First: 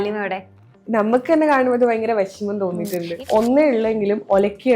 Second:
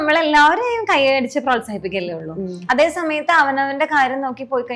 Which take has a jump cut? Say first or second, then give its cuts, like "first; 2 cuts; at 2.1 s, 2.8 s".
first; 1 cut; at 3.1 s